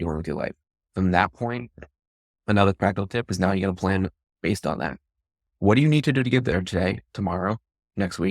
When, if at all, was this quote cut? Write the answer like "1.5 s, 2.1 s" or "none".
none